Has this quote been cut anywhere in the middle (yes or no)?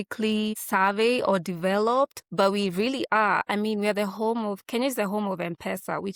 no